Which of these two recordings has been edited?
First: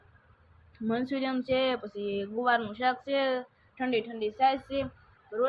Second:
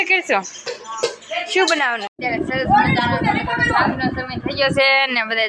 second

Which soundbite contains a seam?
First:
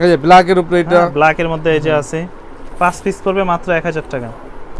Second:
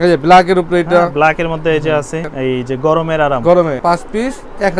second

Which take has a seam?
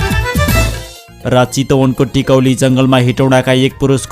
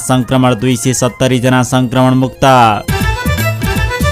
first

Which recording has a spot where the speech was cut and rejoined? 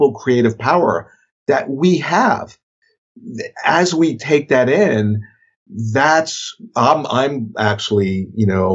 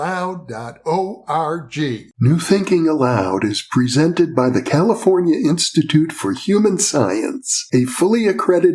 second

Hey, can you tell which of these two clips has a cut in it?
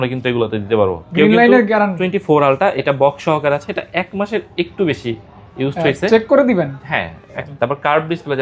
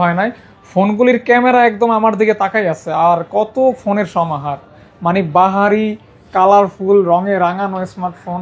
first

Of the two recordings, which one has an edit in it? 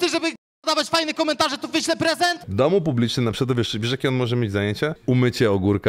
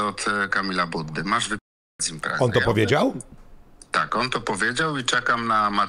first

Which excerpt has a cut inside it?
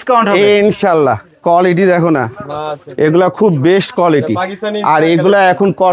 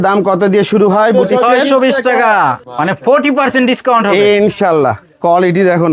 second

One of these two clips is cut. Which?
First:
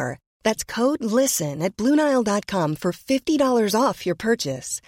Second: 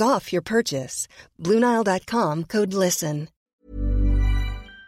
second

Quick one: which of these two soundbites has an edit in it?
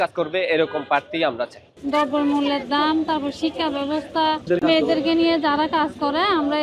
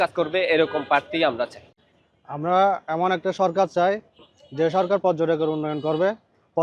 first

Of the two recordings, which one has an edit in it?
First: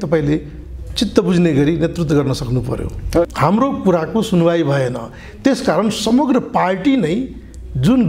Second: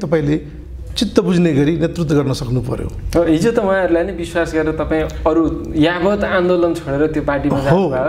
first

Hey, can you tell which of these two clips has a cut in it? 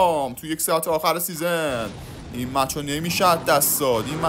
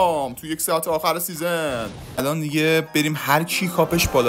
second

